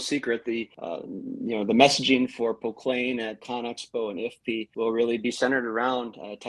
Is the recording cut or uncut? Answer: cut